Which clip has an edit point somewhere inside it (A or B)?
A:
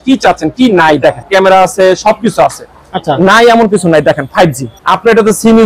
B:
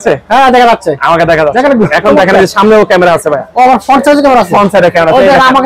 A